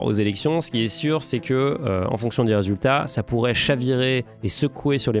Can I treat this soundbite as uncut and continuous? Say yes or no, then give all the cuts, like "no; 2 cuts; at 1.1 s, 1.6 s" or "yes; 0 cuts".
yes; 0 cuts